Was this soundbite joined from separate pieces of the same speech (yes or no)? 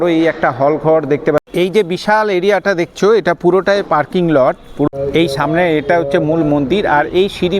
yes